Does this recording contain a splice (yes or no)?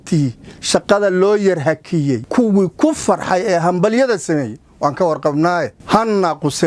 yes